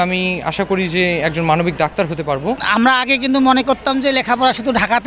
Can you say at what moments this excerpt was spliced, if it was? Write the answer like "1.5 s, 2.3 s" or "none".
2.6 s